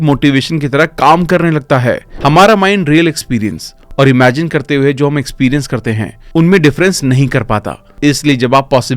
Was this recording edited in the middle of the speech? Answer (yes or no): yes